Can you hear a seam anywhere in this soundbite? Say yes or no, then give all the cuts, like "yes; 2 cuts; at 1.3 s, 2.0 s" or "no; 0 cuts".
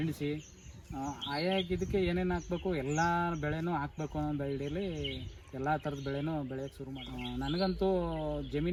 no; 0 cuts